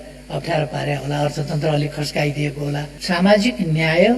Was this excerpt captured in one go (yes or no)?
no